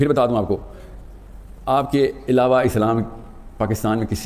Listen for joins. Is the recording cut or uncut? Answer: uncut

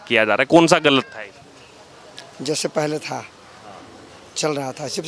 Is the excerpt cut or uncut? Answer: uncut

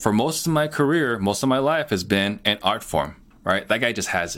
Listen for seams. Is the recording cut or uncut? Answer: cut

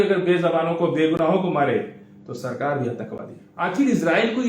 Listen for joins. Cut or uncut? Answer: cut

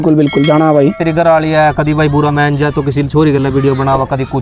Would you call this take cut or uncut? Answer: cut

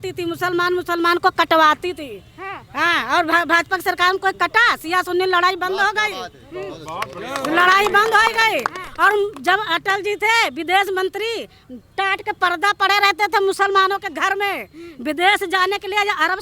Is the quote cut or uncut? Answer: uncut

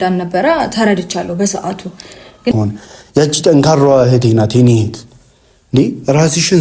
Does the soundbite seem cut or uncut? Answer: cut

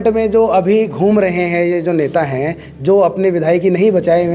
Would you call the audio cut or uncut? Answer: uncut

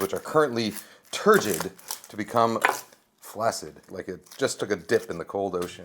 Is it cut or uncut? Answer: cut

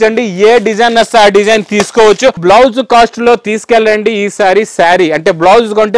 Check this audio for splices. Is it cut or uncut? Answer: cut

